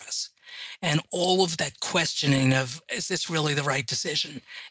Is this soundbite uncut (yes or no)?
no